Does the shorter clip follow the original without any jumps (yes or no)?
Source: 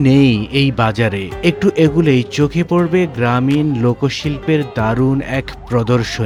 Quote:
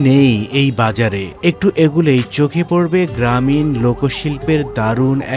yes